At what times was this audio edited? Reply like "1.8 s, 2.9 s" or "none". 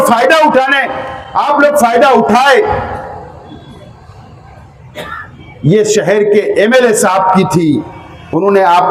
none